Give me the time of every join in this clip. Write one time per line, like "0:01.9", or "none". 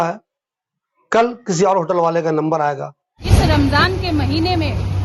0:03.1